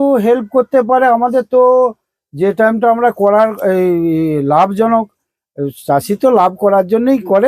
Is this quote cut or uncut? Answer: uncut